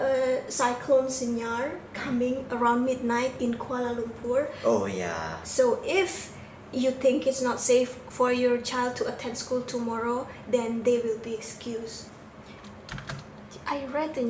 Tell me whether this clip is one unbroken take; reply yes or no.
no